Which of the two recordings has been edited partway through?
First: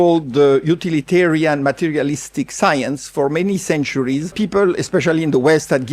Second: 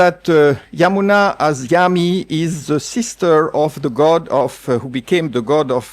first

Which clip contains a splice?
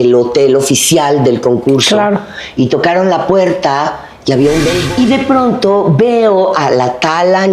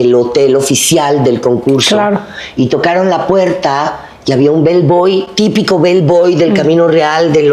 first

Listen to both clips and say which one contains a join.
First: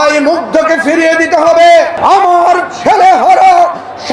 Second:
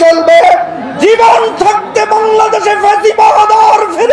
first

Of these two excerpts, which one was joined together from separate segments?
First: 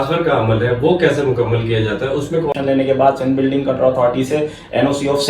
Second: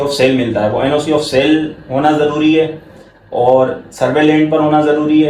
first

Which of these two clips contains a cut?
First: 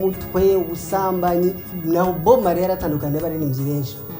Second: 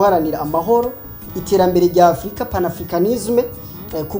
first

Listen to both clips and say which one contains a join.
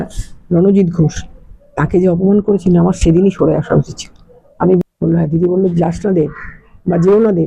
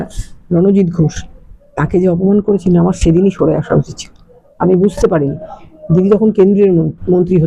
first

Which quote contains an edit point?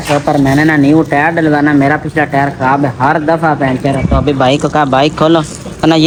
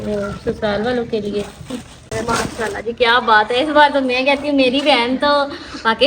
second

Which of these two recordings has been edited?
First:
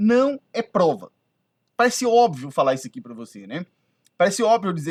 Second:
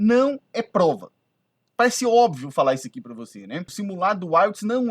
second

